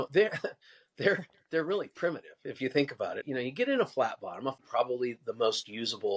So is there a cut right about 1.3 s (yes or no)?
no